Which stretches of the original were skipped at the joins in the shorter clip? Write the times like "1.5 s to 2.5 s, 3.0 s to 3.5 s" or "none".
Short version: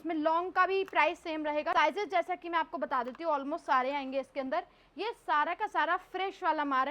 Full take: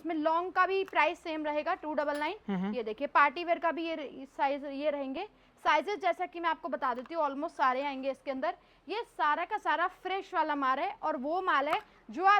1.7 s to 5.6 s